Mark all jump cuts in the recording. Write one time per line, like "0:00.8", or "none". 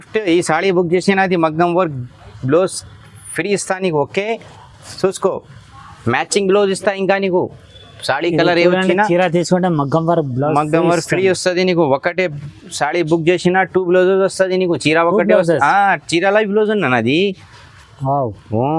none